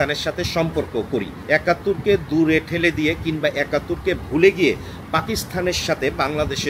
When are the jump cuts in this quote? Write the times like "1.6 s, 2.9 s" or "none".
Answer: 1.3 s